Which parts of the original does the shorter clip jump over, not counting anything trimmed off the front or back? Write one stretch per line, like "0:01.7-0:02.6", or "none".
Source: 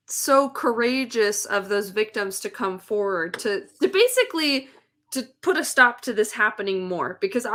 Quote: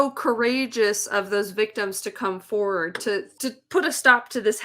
0:03.7-0:05.0